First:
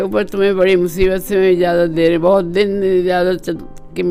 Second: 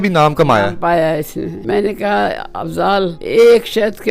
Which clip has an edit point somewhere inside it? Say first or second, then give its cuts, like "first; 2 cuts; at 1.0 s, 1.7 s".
second; 2 cuts; at 1.6 s, 3.2 s